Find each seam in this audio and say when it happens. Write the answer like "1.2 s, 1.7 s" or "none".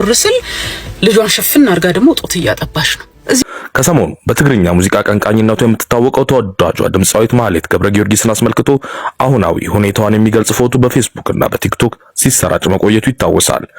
3.4 s